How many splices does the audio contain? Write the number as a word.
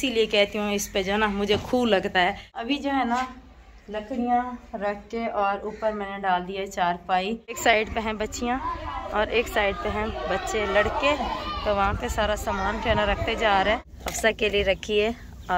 three